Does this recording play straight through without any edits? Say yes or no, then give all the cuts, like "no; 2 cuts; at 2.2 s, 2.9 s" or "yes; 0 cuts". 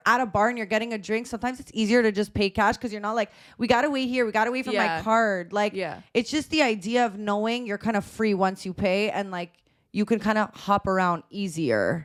yes; 0 cuts